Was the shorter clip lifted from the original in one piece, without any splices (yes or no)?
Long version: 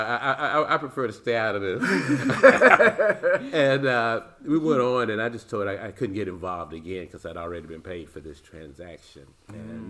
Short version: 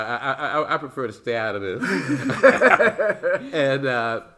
yes